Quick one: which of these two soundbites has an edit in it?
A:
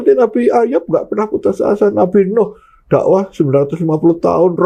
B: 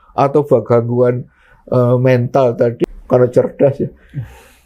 B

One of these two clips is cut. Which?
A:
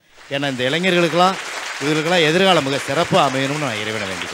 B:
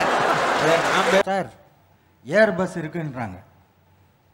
B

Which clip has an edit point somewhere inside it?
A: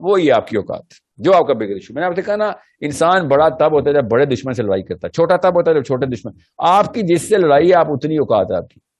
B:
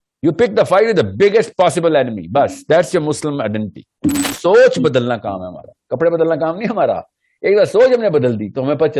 B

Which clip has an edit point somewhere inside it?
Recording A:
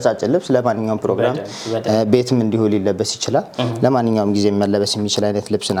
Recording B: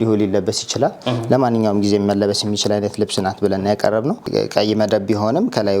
B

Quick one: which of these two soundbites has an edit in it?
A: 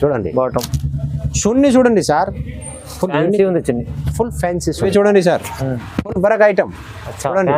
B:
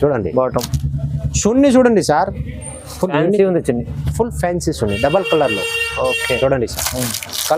A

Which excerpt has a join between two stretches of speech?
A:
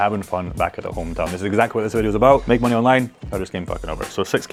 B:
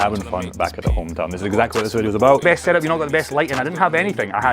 B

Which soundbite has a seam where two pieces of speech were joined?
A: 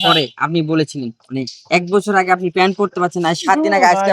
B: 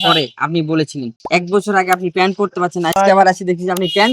B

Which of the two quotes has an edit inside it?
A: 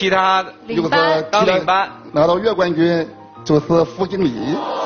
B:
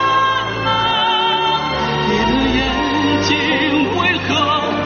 A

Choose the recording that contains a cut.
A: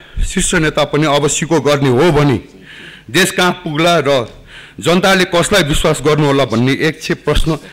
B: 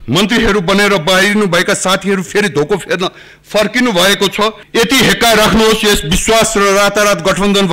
B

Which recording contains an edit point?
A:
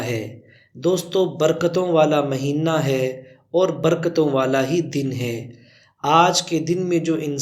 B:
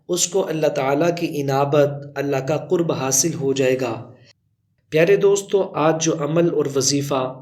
B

